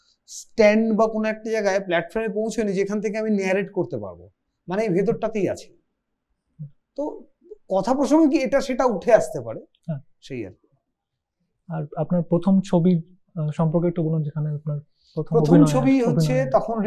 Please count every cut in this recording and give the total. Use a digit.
0